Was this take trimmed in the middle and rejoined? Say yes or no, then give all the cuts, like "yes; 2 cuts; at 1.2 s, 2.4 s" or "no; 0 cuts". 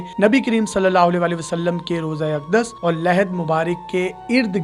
no; 0 cuts